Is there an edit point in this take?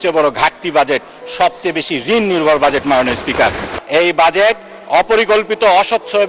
yes; 1 cut; at 3.7 s

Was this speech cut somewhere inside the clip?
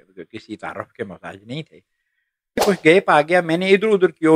yes; 1 cut; at 2.6 s

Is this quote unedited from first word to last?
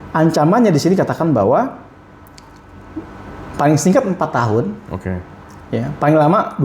yes; 0 cuts

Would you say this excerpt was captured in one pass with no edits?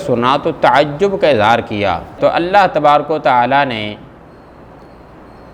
no; 1 cut; at 2.2 s

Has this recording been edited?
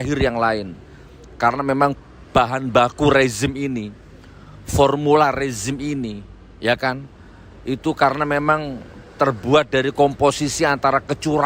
no; 0 cuts

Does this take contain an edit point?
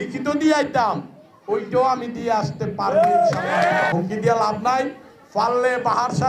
yes; 1 cut; at 3.9 s

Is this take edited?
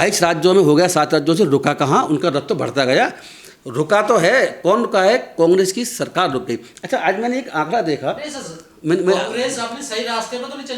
no; 0 cuts

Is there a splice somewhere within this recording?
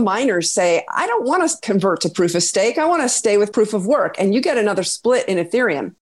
no; 0 cuts

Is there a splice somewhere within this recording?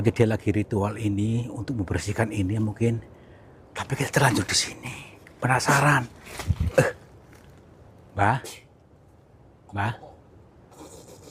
no; 0 cuts

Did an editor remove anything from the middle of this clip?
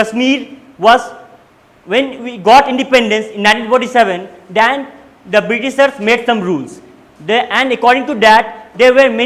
no; 0 cuts

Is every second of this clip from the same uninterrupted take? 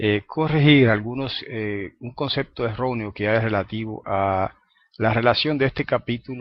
yes; 0 cuts

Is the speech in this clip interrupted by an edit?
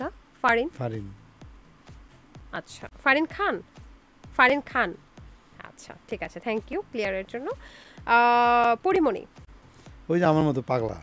no; 0 cuts

